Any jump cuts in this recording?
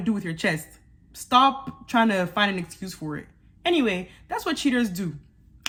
no; 0 cuts

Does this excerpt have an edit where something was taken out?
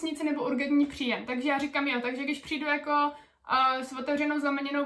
no; 0 cuts

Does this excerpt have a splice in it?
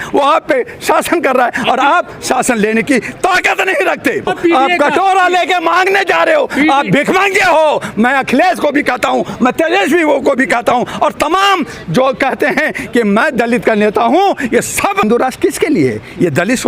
yes; 2 cuts; at 4.3 s, 15.0 s

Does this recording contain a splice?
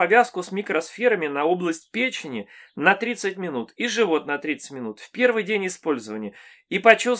no; 0 cuts

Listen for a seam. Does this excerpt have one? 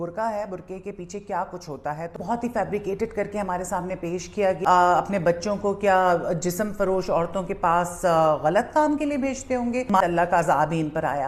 yes; 3 cuts; at 2.2 s, 4.6 s, 10.0 s

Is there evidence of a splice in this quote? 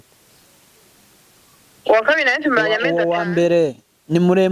yes; 1 cut; at 2.8 s

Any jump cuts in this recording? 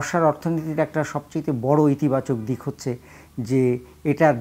no; 0 cuts

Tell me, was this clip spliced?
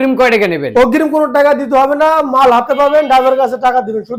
no; 0 cuts

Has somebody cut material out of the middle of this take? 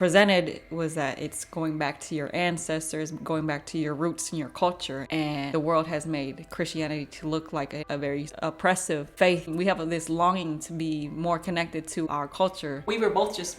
yes; 4 cuts; at 5.3 s, 8.0 s, 9.5 s, 12.5 s

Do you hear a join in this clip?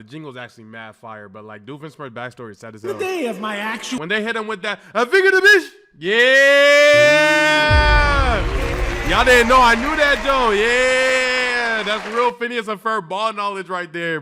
no; 0 cuts

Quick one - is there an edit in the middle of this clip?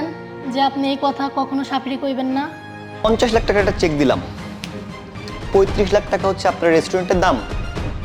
yes; 1 cut; at 3.0 s

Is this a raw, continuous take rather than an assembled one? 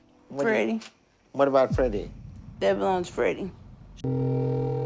no; 1 cut; at 3.8 s

